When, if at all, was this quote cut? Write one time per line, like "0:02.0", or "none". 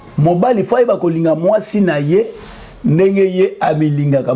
none